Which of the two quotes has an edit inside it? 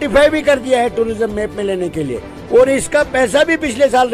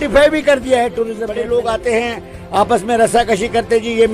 second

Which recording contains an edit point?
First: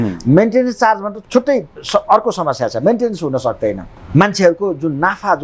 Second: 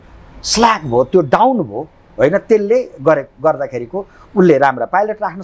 first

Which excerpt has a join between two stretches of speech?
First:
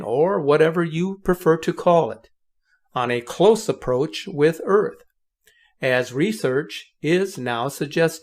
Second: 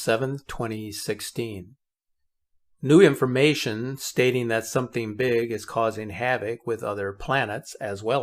first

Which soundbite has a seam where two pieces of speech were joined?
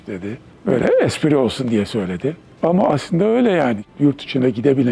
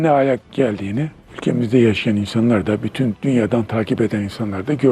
first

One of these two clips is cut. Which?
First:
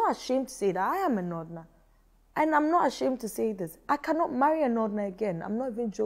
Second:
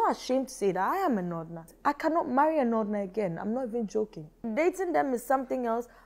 second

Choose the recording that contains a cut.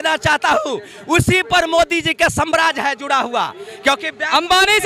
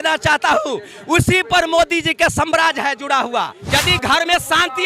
second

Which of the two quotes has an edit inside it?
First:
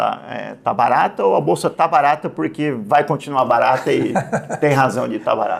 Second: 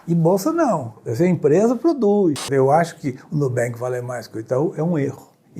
second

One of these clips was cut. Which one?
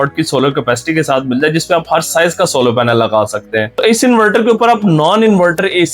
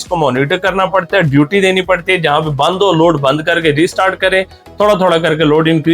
first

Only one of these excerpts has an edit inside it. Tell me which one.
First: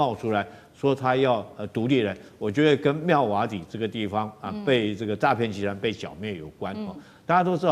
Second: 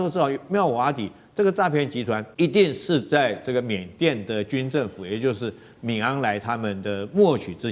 second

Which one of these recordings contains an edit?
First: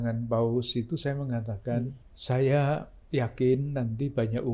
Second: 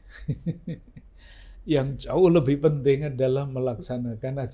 first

